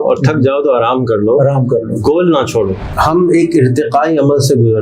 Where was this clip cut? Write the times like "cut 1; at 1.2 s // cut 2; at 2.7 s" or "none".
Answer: cut 1; at 2.8 s